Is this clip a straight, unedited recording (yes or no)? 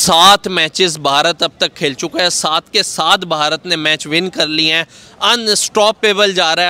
yes